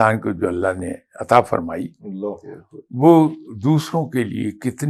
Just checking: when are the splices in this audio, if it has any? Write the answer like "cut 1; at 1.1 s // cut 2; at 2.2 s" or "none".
none